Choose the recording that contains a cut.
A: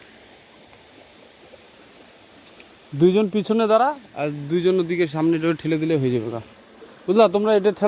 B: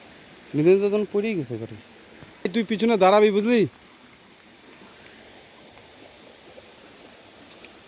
B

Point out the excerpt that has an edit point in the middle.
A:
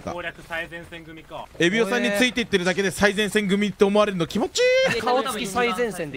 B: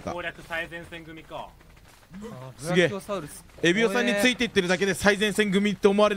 A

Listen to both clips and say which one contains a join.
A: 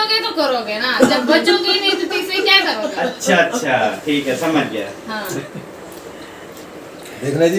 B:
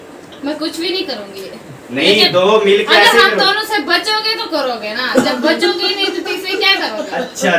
A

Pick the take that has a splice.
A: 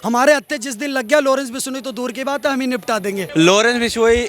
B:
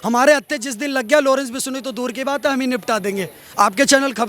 A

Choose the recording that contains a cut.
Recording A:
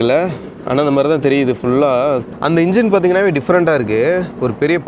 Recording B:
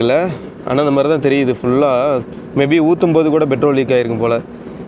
A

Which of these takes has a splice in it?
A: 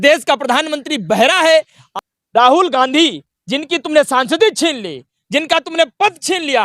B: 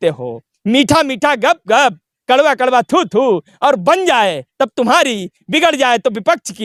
A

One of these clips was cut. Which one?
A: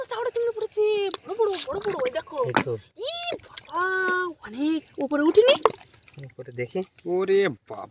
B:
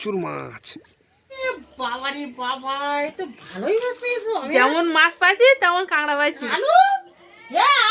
B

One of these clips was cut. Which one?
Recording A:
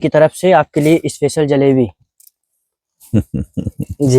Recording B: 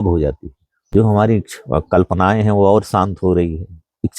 B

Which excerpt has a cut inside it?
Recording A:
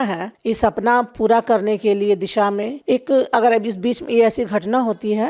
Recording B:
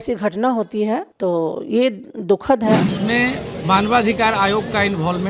B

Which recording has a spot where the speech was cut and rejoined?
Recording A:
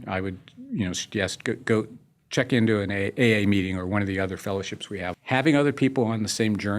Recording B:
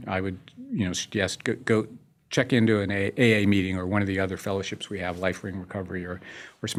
A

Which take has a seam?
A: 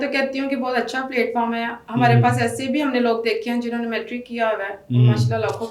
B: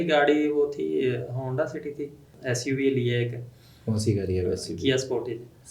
B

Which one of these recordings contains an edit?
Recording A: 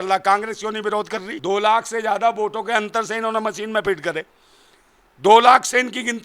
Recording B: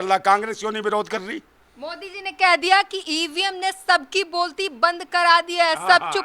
A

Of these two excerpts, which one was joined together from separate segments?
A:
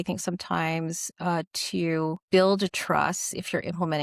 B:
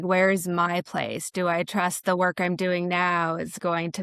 A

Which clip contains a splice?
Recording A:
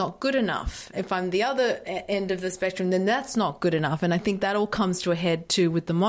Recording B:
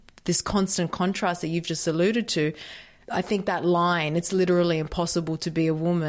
A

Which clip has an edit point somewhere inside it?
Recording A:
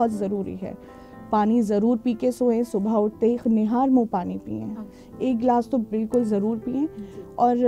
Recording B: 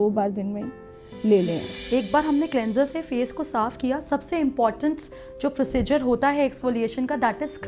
B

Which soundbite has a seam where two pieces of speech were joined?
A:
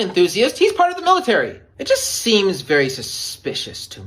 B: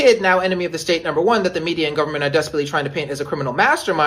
A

